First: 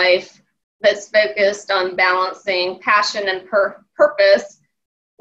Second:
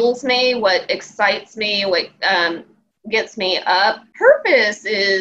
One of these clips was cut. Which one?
second; 1 cut; at 4.1 s

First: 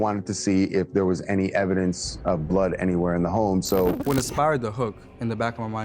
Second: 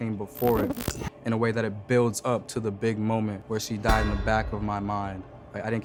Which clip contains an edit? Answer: first; 1 cut; at 4.0 s

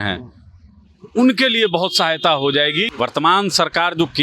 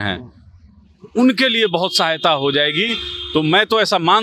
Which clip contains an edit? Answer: first; 1 cut; at 2.9 s

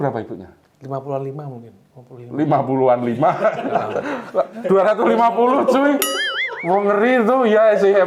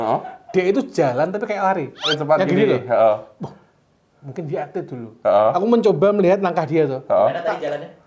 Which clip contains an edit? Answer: second; 1 cut; at 2.2 s

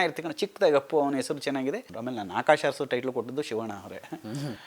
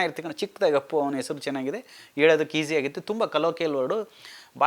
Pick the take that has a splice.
first; 1 cut; at 1.9 s

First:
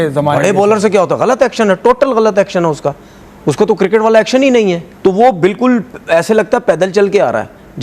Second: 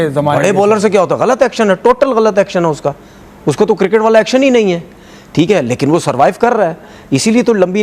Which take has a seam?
first; 1 cut; at 4.9 s

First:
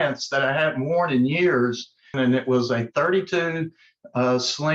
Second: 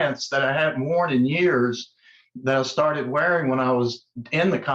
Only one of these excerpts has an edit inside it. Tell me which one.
first; 1 cut; at 2.1 s

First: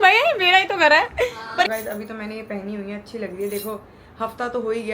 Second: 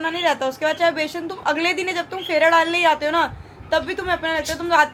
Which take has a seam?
first; 1 cut; at 1.7 s

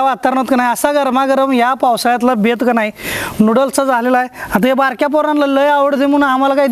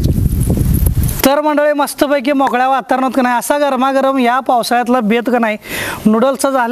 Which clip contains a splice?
second; 1 cut; at 1.2 s

